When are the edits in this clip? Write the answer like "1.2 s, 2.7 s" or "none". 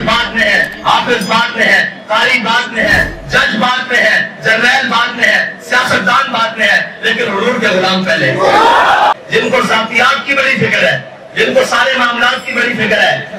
9.1 s